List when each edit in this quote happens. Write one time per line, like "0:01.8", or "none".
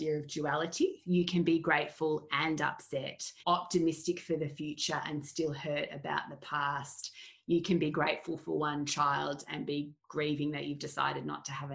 0:01.0
0:03.3
0:10.0